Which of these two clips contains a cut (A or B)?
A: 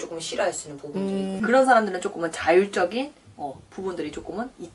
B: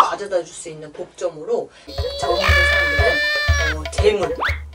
B